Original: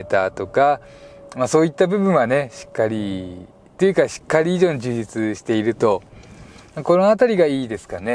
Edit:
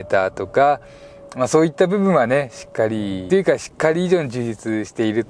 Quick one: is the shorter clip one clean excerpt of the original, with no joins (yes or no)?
no